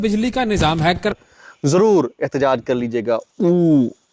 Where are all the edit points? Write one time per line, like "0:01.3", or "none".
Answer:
0:01.1